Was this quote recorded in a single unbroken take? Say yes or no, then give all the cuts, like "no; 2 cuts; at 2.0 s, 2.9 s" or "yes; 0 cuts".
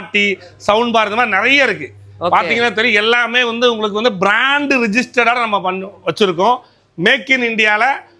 yes; 0 cuts